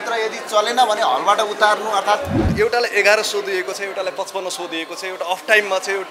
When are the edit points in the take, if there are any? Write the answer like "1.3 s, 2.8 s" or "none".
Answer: 2.5 s